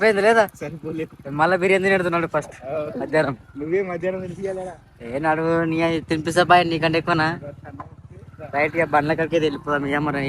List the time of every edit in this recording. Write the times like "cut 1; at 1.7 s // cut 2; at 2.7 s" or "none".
none